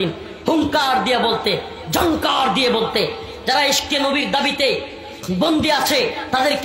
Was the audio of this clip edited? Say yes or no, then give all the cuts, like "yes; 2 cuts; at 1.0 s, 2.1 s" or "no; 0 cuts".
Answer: no; 0 cuts